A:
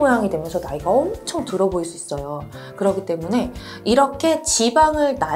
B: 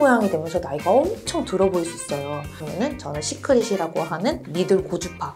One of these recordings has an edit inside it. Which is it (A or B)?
B